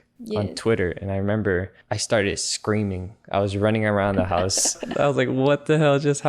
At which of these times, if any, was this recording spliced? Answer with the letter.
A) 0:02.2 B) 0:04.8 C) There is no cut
B